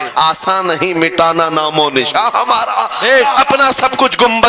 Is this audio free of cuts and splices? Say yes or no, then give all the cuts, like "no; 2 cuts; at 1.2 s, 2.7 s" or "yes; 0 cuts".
no; 1 cut; at 3.2 s